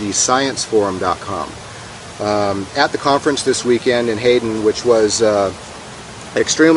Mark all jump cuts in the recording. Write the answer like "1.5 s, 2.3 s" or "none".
4.4 s